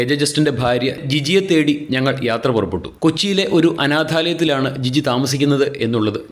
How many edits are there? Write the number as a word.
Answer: one